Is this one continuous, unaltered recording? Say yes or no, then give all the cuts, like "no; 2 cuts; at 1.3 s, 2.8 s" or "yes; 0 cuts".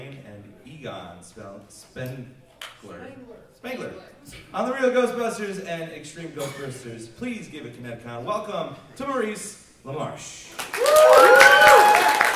no; 1 cut; at 1.3 s